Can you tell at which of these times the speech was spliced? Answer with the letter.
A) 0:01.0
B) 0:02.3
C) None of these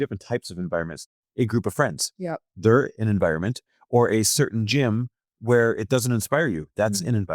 A